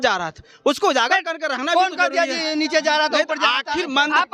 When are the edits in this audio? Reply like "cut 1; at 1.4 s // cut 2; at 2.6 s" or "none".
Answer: none